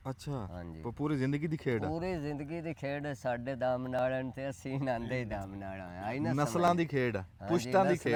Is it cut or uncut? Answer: uncut